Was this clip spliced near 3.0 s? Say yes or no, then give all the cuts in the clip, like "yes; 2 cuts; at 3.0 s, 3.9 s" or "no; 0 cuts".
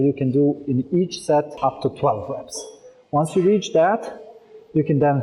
no; 0 cuts